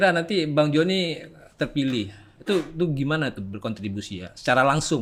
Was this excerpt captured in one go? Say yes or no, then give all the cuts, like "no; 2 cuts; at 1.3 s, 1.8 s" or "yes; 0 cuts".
yes; 0 cuts